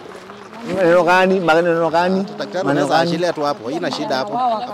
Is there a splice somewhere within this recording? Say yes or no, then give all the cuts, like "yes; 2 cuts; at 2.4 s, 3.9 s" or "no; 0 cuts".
no; 0 cuts